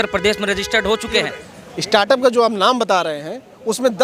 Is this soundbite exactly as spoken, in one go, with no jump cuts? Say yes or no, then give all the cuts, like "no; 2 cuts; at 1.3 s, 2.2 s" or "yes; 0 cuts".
no; 1 cut; at 1.4 s